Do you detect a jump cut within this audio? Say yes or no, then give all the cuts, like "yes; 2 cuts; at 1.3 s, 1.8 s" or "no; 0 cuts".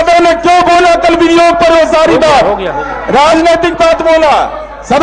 no; 0 cuts